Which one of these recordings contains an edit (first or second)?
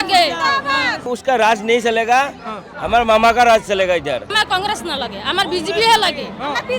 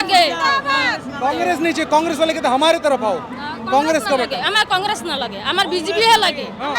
first